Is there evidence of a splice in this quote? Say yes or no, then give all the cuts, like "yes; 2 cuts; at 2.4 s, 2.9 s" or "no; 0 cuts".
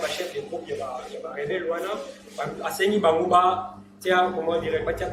no; 0 cuts